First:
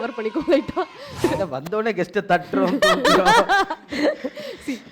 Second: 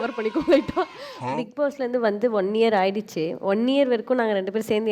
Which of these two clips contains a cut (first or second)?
first